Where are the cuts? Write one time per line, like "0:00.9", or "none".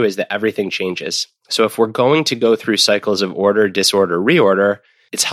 none

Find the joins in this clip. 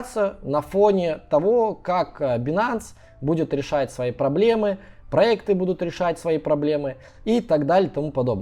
none

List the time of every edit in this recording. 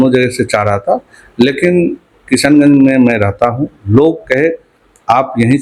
none

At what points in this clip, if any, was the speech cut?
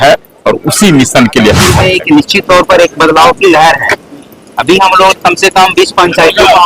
0:01.7

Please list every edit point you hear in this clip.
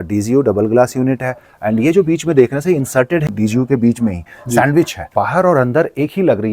0:03.3
0:05.0

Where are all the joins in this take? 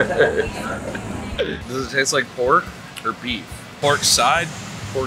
0:01.6

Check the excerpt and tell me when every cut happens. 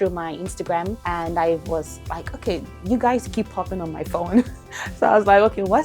0:01.0

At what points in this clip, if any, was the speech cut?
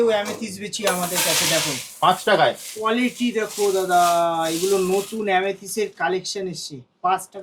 none

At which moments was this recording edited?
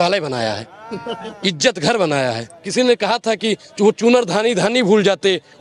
0:02.5

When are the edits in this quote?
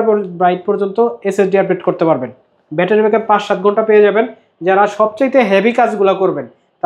none

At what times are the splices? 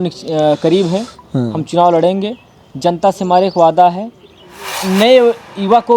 0:04.7

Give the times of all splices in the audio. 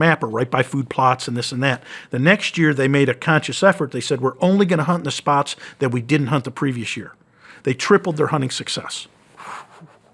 none

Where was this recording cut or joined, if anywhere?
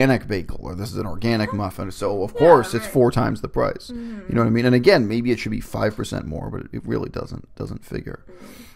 none

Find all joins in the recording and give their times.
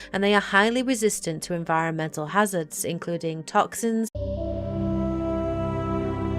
none

